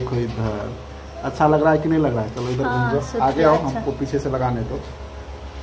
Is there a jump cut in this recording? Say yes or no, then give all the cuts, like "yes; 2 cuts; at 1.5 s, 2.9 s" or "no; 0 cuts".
no; 0 cuts